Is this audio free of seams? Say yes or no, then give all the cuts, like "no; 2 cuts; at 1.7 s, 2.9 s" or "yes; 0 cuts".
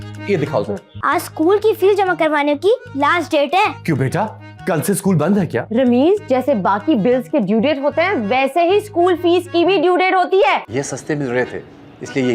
no; 2 cuts; at 0.9 s, 10.6 s